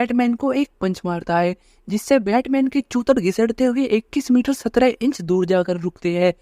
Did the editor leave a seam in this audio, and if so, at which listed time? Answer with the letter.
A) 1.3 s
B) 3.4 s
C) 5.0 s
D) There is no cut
D